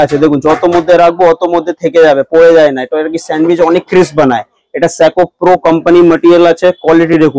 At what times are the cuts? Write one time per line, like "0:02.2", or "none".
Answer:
none